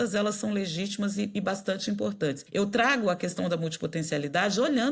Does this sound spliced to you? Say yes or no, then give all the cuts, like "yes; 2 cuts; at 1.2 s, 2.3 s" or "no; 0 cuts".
yes; 1 cut; at 2.4 s